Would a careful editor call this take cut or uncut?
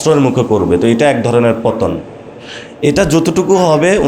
uncut